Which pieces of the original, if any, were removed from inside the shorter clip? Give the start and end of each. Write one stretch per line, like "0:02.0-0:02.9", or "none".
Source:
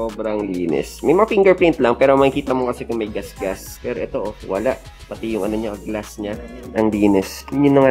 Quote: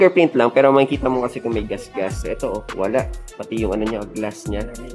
0:03.7-0:04.0